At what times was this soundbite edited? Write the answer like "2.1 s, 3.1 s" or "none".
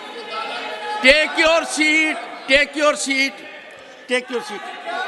none